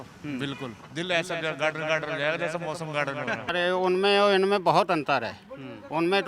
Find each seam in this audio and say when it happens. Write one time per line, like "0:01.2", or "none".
0:03.4

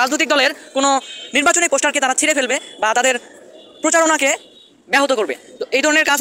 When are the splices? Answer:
none

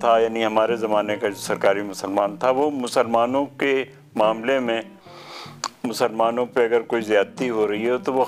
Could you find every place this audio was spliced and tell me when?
none

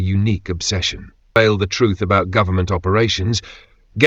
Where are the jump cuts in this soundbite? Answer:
0:01.4

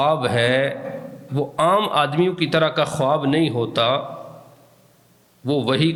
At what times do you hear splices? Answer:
none

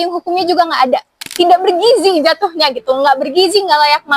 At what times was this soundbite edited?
0:01.2

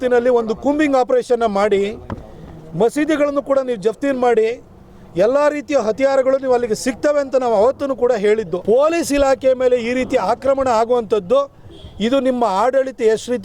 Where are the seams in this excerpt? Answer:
0:08.5

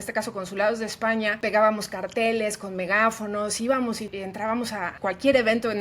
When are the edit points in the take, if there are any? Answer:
0:01.4
0:04.1
0:04.9

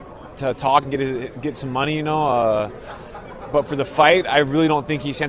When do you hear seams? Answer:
0:03.0

